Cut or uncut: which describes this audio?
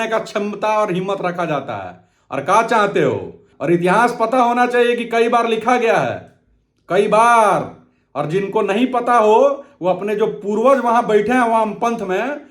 cut